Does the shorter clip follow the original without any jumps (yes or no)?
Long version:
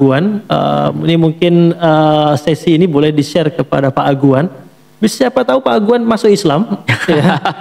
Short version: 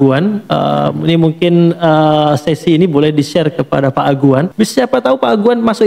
no